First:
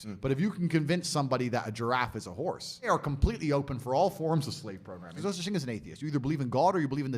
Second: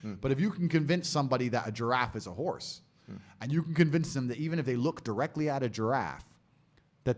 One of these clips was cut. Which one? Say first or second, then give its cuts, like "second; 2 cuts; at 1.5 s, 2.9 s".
first; 2 cuts; at 2.9 s, 5.1 s